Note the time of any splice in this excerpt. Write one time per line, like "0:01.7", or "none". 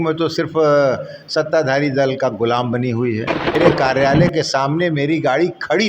0:03.6